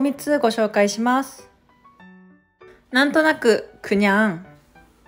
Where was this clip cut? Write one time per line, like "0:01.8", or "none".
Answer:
0:01.4
0:02.9